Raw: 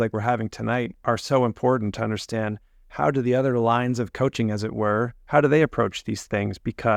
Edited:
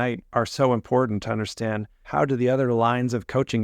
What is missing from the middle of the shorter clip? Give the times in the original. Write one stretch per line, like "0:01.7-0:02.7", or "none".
0:02.7-0:02.8